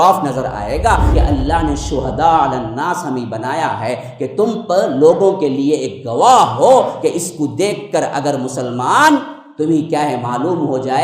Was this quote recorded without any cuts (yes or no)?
no